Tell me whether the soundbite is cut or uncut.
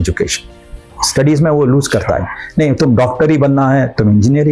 uncut